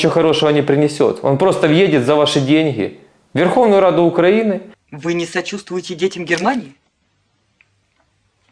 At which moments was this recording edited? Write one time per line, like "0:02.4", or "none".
0:04.7